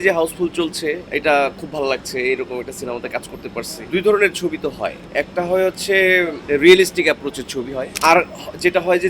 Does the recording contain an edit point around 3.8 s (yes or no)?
yes